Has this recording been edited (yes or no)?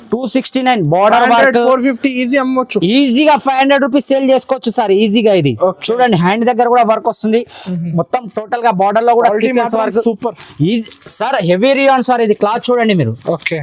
no